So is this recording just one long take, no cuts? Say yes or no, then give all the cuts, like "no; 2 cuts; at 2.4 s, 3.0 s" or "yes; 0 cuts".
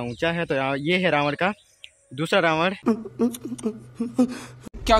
yes; 0 cuts